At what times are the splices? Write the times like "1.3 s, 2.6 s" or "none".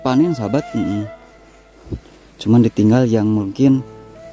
none